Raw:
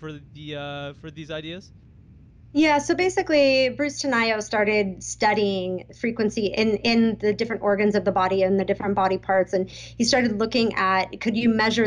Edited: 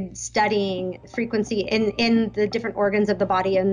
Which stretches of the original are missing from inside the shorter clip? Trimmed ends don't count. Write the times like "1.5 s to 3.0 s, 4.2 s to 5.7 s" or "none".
none